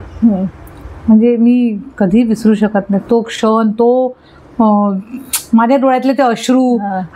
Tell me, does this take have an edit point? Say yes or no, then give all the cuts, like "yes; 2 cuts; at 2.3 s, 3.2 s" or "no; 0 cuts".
no; 0 cuts